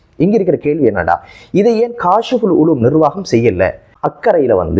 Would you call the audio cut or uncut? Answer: cut